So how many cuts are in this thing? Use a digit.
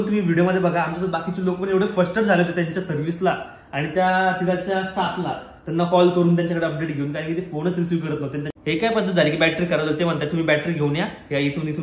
1